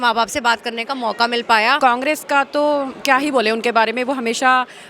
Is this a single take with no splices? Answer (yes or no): no